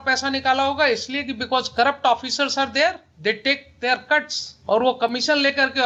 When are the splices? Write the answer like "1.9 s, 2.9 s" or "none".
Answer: none